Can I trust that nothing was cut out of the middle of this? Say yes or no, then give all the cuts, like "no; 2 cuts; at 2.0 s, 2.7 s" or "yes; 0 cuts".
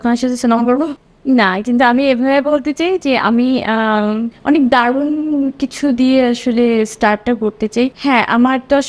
yes; 0 cuts